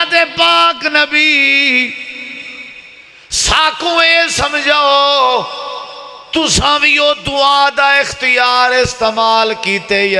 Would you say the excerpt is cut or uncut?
uncut